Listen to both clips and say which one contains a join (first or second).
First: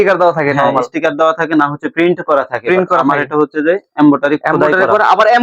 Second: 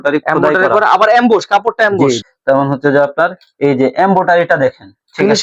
second